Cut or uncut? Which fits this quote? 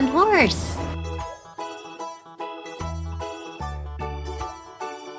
uncut